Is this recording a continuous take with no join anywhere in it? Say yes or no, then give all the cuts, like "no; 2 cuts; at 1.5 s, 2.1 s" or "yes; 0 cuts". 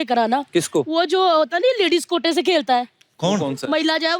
yes; 0 cuts